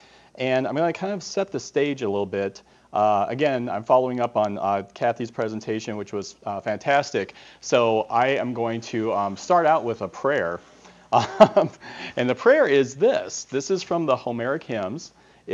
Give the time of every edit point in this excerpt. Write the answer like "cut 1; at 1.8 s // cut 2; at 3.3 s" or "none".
cut 1; at 1.7 s

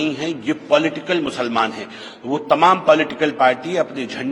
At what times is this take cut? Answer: none

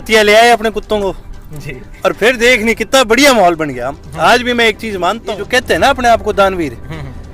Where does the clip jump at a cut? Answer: cut 1; at 5.4 s

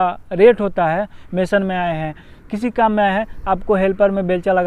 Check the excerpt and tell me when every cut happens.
cut 1; at 1.2 s

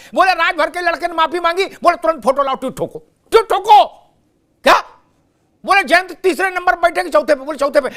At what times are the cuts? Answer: none

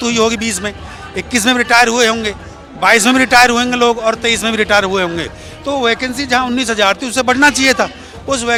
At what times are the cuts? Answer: none

